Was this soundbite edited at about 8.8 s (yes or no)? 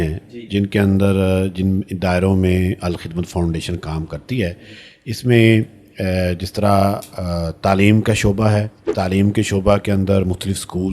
yes